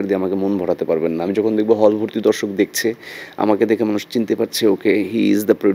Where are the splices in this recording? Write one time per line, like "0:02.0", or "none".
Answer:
none